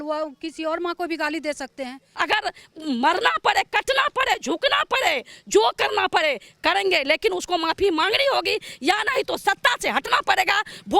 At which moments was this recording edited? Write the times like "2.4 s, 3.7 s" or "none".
2.0 s